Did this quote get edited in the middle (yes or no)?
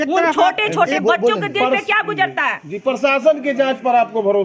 no